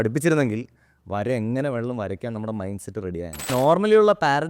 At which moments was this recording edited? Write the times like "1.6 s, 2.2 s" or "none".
3.5 s

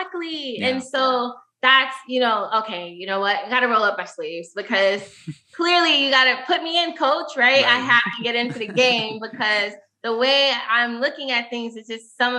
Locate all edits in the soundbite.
none

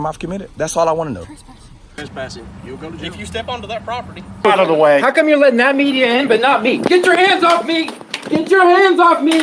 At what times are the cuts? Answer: 1.9 s, 4.4 s

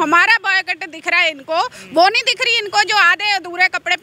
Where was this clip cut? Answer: none

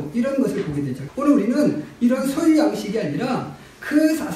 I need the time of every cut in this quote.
1.0 s

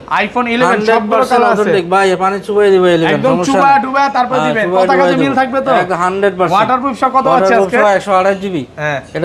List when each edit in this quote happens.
none

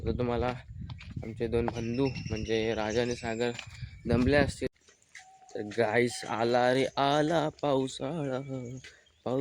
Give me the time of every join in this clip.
4.7 s

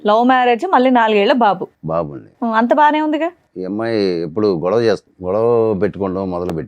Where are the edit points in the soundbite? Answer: 3.5 s, 5.1 s

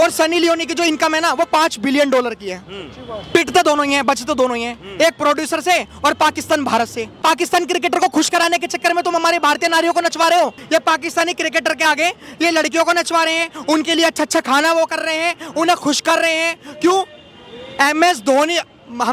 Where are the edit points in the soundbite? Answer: 7.2 s, 10.6 s

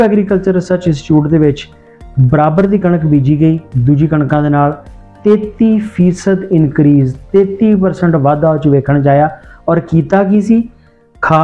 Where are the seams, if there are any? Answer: none

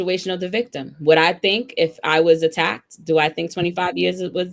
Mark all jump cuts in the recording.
none

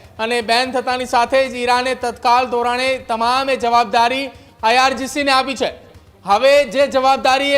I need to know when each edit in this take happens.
none

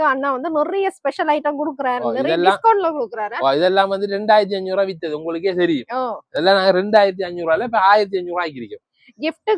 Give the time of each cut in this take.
none

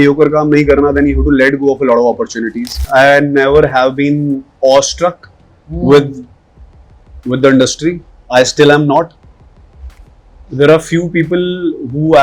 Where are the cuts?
2.8 s, 8.1 s

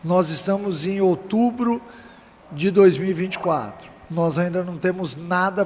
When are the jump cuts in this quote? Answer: none

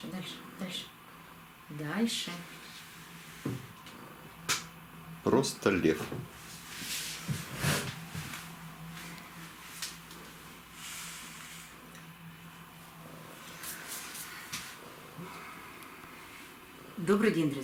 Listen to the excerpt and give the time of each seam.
none

